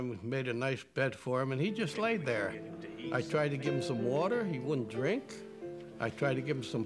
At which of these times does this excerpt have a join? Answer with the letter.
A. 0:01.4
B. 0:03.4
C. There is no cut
A